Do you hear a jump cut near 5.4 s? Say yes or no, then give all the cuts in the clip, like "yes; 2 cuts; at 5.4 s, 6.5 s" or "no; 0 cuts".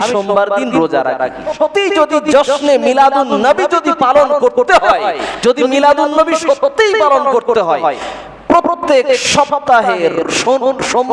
no; 1 cut; at 1.5 s